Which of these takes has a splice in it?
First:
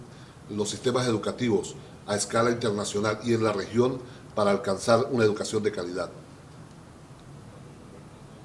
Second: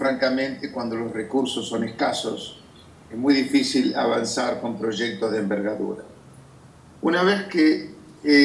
first; 1 cut; at 2.6 s

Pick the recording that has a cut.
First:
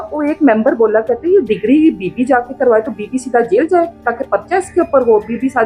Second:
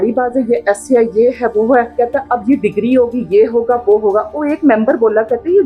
second; 1 cut; at 1.9 s

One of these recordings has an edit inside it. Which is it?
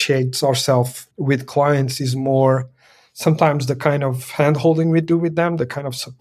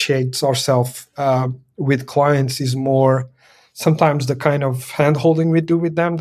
first; 1 cut; at 1.0 s

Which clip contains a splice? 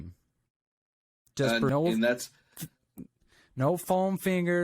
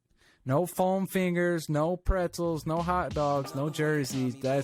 first; 1 cut; at 1.7 s

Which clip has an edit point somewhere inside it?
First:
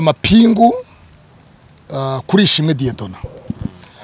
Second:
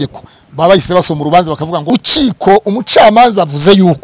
second; 1 cut; at 1.9 s

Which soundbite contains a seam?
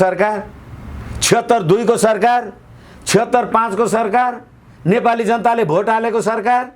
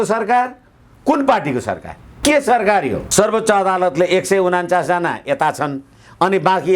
second; 1 cut; at 3.0 s

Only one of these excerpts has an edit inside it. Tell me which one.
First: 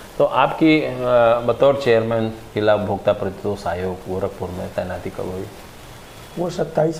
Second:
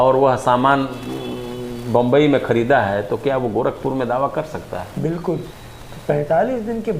second; 1 cut; at 5.5 s

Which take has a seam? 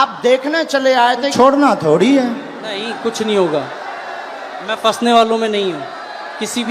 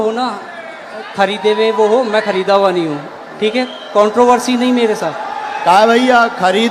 first; 1 cut; at 1.3 s

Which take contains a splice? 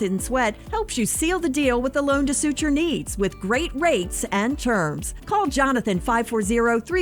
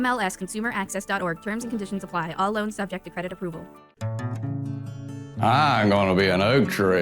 second; 1 cut; at 3.9 s

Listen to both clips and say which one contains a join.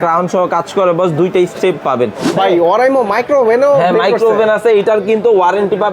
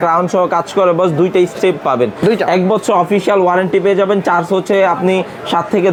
first; 1 cut; at 2.2 s

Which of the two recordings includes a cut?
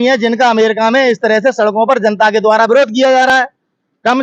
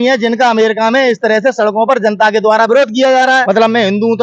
second; 1 cut; at 3.3 s

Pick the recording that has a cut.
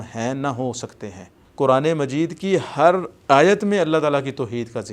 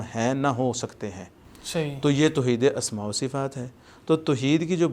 first; 1 cut; at 1.4 s

